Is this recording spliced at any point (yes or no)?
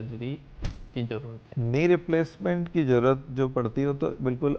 yes